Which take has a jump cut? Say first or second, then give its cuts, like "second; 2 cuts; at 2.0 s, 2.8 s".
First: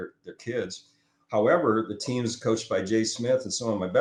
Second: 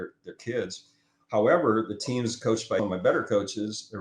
second; 1 cut; at 2.8 s